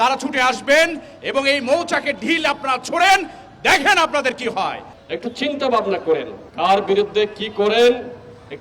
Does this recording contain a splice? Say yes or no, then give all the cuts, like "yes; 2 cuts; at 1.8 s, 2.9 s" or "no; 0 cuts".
yes; 2 cuts; at 4.8 s, 6.4 s